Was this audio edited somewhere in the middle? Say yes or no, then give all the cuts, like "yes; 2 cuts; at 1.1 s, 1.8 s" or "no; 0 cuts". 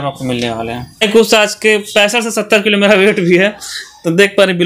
yes; 1 cut; at 1.0 s